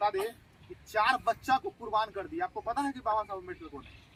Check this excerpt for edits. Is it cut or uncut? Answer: uncut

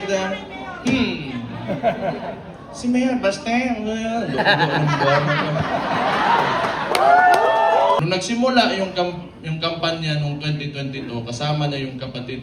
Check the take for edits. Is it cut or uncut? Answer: cut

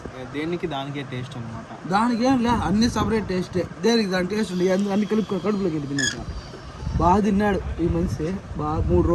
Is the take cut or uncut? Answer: uncut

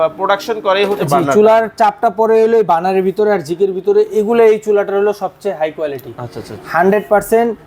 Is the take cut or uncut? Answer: uncut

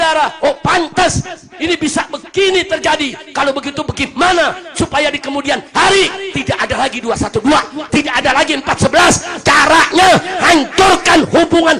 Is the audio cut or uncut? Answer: uncut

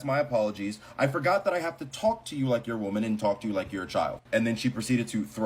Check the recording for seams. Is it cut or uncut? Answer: uncut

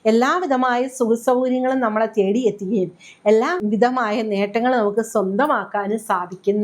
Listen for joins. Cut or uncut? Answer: cut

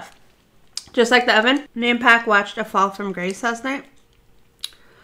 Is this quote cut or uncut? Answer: cut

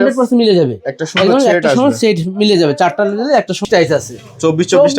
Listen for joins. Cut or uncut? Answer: cut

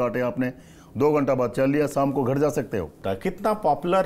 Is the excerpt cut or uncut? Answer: cut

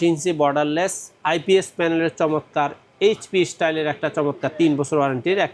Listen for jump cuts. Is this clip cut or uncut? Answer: uncut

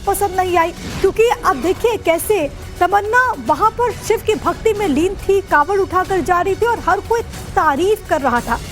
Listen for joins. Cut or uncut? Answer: cut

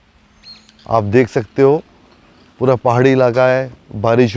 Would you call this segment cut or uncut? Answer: uncut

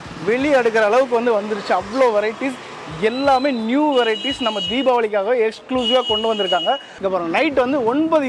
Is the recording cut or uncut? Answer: cut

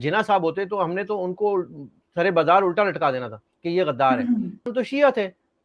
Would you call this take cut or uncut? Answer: cut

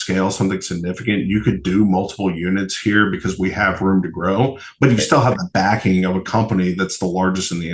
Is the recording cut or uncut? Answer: uncut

